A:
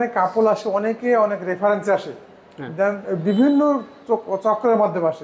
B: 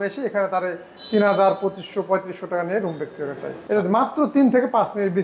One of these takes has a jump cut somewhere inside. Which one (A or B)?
B